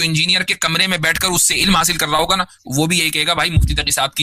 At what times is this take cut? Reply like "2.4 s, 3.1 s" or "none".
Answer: none